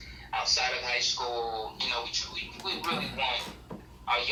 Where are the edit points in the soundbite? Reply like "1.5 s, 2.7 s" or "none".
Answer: none

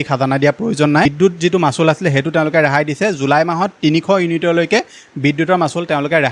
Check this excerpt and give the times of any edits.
1.1 s

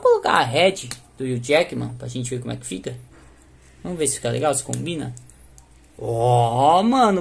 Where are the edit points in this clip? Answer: none

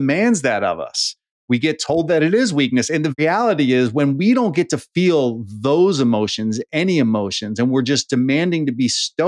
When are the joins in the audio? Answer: 3.2 s

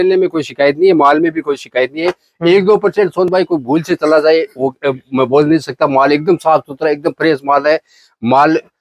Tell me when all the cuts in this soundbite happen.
none

